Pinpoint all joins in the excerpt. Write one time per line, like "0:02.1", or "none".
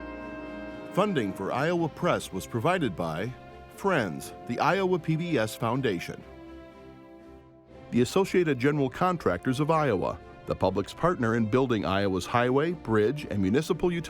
0:00.9

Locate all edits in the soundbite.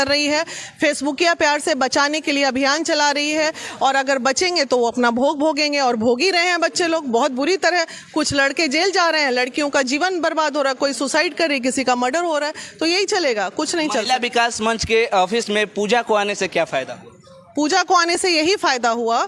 none

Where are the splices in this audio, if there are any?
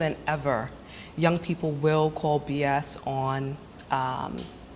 none

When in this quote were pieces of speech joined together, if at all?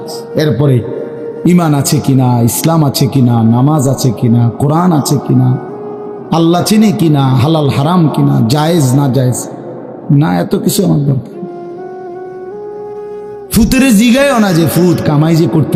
none

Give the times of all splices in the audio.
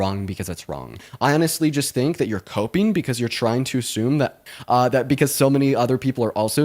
0:01.1
0:04.4

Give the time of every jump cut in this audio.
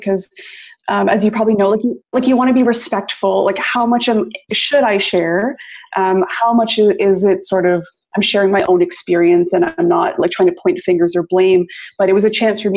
0:02.1

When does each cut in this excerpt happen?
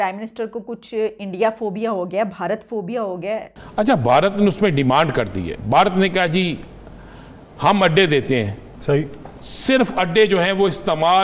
0:03.6

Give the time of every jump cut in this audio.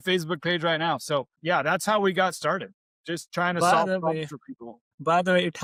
none

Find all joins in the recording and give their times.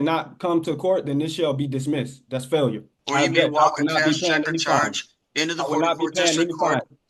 0:02.8

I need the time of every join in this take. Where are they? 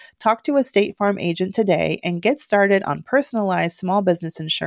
none

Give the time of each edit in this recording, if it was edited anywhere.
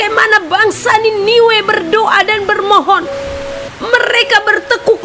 0:03.6

